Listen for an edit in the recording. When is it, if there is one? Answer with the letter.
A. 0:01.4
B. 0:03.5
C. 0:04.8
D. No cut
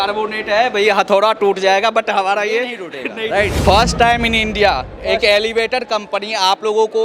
B